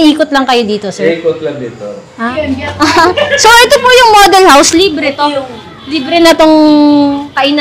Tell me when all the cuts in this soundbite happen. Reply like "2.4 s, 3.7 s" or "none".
2.2 s

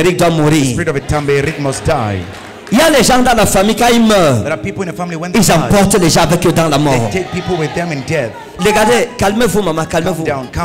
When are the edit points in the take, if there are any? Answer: 8.4 s

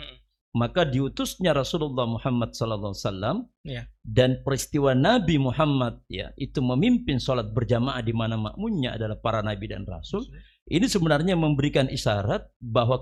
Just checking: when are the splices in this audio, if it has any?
none

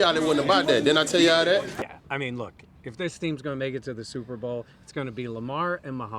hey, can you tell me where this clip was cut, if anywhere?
1.8 s

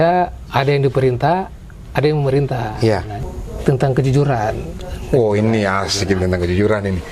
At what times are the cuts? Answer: 3.1 s

